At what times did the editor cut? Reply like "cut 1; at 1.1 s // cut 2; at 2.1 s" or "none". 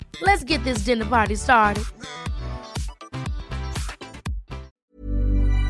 cut 1; at 4.7 s